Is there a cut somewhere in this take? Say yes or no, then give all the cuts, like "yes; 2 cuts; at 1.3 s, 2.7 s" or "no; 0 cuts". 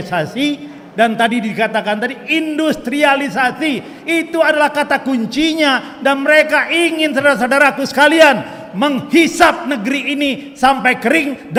no; 0 cuts